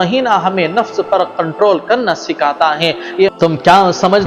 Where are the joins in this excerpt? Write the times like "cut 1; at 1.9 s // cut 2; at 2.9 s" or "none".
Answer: cut 1; at 3.3 s